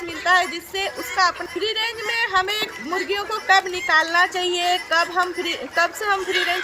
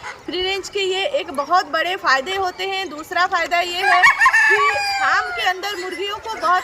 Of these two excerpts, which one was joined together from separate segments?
first; 1 cut; at 1.4 s

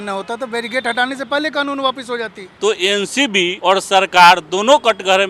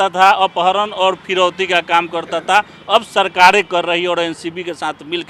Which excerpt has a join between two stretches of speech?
first; 2 cuts; at 2.4 s, 3.5 s

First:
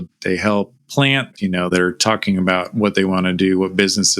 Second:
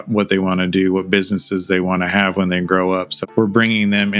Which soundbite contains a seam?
first; 1 cut; at 1.3 s

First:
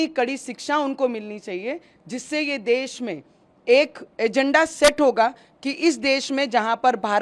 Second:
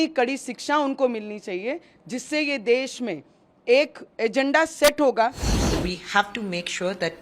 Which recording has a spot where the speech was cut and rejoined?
second; 1 cut; at 5.5 s

